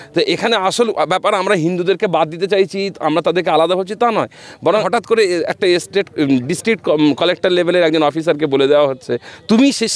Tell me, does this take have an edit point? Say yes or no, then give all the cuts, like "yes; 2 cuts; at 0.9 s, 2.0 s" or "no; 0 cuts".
yes; 1 cut; at 4.8 s